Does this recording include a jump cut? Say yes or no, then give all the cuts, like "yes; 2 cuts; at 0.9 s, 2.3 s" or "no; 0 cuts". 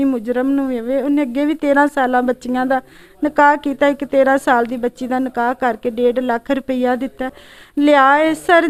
no; 0 cuts